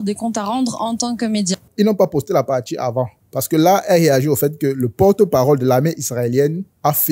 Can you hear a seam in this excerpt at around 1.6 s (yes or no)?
no